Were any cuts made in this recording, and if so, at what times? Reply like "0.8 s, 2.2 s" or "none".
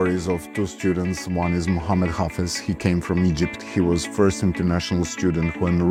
none